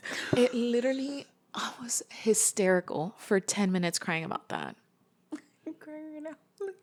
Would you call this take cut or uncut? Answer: uncut